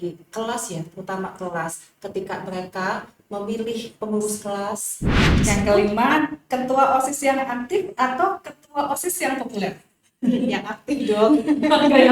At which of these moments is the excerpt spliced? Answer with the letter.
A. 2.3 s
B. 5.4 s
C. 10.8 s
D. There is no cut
B